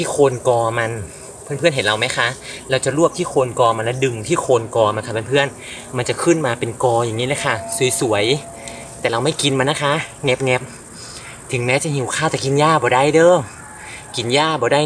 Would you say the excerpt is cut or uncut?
uncut